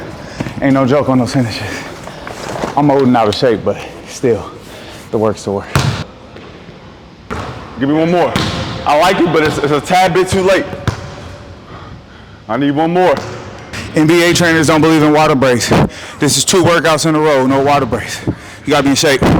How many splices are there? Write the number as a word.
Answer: two